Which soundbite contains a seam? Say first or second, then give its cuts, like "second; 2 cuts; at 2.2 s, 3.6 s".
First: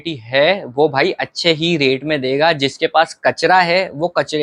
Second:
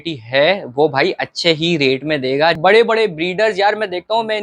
second; 1 cut; at 2.6 s